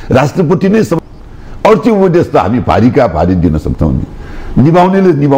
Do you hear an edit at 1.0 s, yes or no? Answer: yes